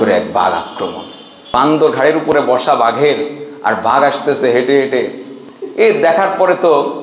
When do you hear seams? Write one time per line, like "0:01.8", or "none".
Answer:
0:01.5

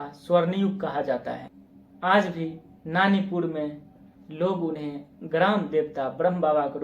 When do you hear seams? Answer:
0:01.5

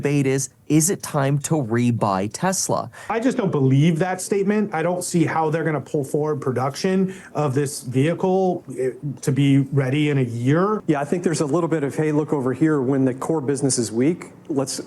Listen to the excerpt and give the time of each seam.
0:03.1
0:10.8

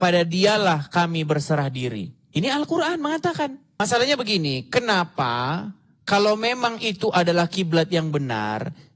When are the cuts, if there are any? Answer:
0:03.8

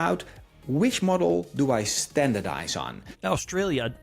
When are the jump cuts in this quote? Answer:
0:03.1

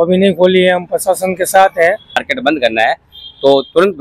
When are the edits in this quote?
0:02.3

